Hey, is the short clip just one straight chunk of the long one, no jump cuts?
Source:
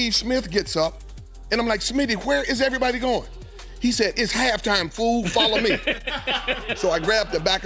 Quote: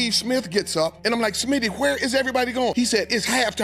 no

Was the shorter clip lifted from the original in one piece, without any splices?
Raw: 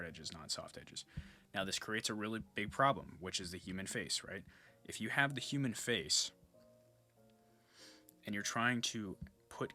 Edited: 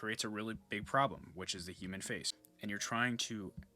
no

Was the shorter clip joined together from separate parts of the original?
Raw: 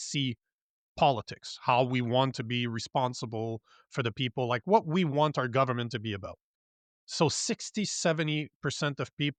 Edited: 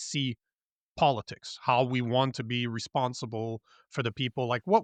no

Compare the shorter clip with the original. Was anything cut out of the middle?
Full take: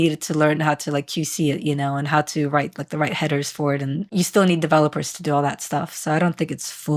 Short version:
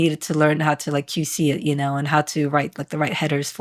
no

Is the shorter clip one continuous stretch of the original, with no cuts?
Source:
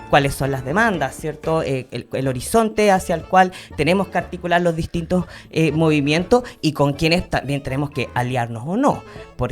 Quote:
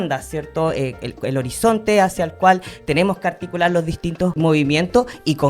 no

